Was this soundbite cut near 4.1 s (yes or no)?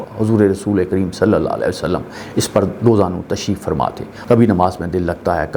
yes